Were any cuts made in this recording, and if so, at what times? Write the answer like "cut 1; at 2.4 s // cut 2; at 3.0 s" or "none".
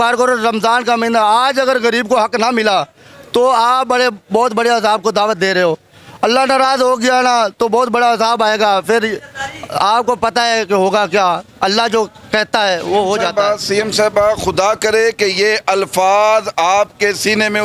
none